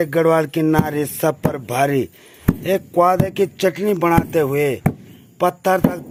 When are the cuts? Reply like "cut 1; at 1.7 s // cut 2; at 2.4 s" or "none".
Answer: none